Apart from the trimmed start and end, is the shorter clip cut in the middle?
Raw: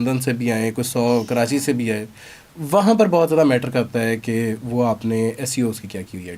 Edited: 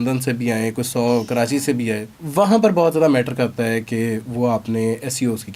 yes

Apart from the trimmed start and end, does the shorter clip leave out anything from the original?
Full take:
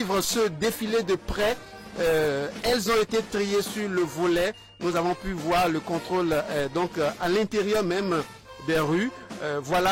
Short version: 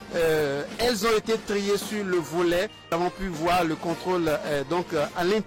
yes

